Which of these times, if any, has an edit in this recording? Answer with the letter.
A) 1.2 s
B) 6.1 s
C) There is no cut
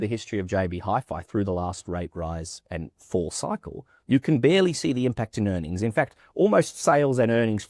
C